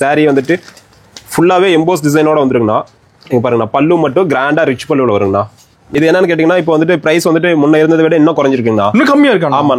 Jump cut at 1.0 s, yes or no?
no